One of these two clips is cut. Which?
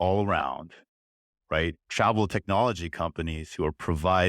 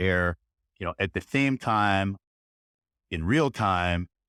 first; 1 cut; at 1.8 s

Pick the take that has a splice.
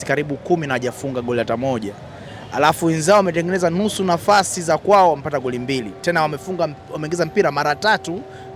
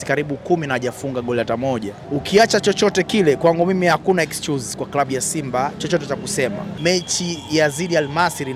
second; 2 cuts; at 2.0 s, 6.7 s

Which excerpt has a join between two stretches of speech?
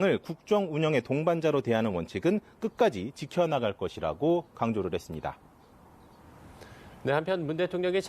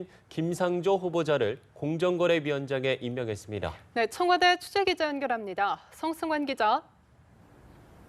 first; 1 cut; at 3.2 s

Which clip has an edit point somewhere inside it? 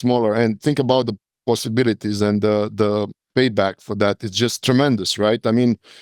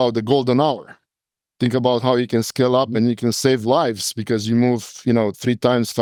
first; 2 cuts; at 1.3 s, 4.6 s

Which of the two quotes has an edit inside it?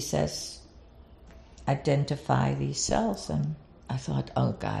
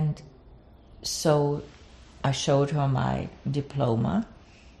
first; 1 cut; at 3.7 s

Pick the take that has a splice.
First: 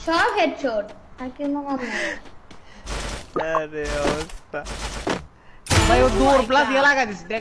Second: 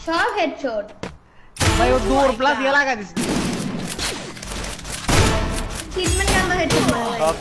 second; 2 cuts; at 1.2 s, 3.2 s

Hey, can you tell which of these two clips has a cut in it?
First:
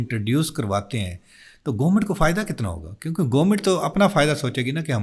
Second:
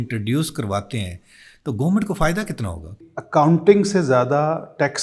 second; 1 cut; at 3.0 s

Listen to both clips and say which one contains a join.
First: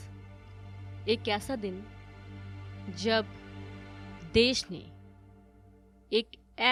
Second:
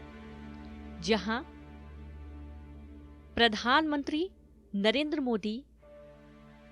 second; 2 cuts; at 1.4 s, 3.3 s

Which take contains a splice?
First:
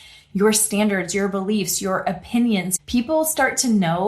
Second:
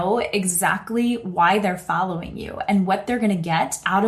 first; 1 cut; at 2.8 s

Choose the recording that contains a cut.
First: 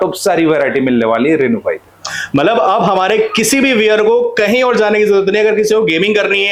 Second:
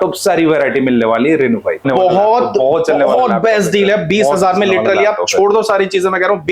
second; 1 cut; at 1.9 s

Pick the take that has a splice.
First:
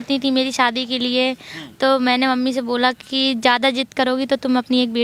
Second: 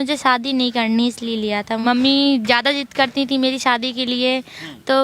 second; 1 cut; at 1.8 s

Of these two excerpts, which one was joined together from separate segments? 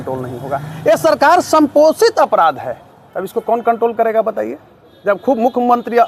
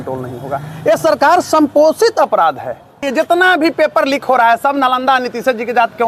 second; 1 cut; at 3.1 s

